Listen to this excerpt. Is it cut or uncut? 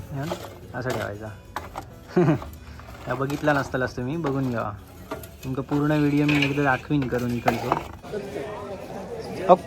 cut